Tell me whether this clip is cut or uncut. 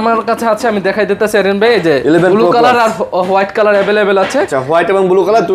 uncut